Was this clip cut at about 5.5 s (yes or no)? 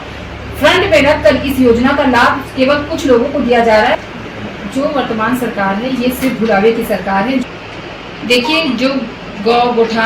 no